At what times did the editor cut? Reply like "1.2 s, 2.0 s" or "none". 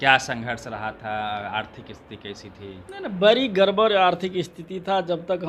none